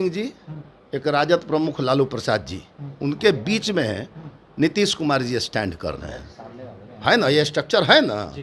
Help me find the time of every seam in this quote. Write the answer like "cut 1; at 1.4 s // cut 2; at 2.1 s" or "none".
none